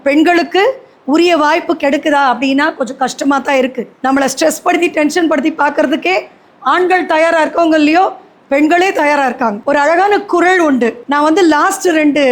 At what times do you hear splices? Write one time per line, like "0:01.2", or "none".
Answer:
0:09.6
0:11.0